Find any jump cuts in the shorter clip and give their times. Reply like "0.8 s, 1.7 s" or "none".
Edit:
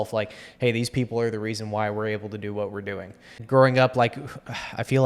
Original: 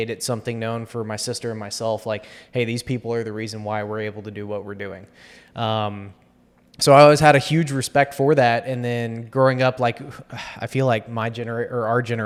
3.3 s